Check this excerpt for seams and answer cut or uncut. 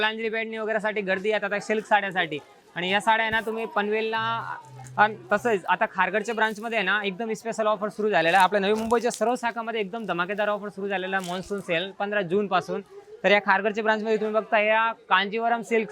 uncut